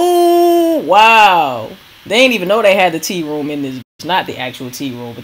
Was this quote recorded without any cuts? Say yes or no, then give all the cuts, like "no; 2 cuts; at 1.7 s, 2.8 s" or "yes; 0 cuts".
yes; 0 cuts